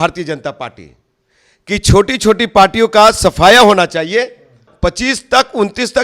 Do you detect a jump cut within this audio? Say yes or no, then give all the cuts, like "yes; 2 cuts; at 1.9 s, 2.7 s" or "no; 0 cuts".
yes; 1 cut; at 4.7 s